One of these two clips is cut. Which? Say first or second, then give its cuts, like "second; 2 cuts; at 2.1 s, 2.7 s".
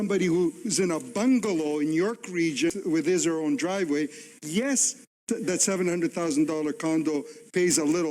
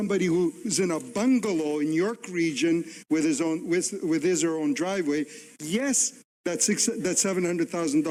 first; 2 cuts; at 2.7 s, 5.2 s